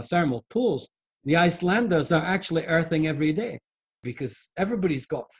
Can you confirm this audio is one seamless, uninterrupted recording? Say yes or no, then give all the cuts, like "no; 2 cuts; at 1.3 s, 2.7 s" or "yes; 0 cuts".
no; 1 cut; at 3.9 s